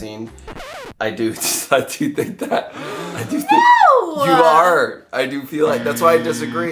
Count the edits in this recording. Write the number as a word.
zero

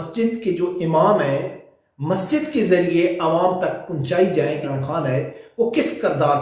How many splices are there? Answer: one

